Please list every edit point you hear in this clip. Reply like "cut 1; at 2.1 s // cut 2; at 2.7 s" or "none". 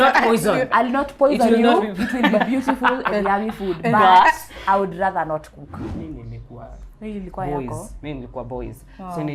cut 1; at 5.8 s